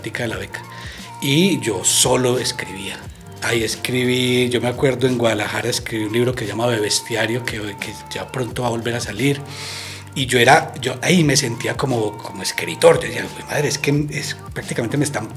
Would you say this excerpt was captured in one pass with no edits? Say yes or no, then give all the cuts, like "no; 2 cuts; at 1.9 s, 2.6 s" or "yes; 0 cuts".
yes; 0 cuts